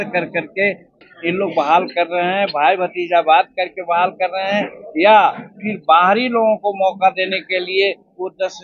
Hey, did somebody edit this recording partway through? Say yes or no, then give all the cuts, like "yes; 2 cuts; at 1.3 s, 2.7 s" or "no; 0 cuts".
yes; 1 cut; at 1.0 s